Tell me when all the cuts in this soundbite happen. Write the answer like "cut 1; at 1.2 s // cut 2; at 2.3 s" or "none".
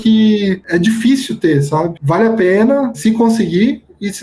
cut 1; at 1.9 s // cut 2; at 3.0 s